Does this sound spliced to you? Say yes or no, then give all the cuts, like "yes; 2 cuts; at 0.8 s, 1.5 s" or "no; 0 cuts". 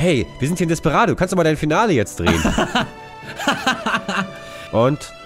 yes; 2 cuts; at 2.3 s, 4.2 s